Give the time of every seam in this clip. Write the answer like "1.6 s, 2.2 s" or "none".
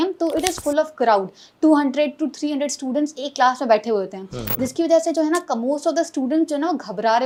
none